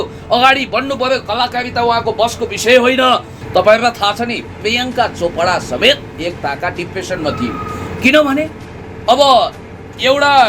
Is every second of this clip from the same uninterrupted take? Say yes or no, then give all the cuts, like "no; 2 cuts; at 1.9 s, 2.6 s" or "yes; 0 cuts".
no; 1 cut; at 3.3 s